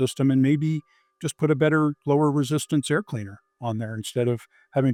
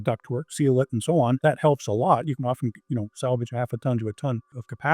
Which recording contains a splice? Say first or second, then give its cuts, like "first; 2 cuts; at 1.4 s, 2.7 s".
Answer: second; 1 cut; at 1.4 s